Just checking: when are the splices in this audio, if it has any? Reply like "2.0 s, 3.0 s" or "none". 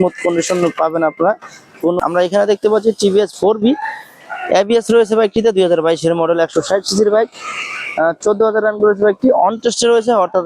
2.0 s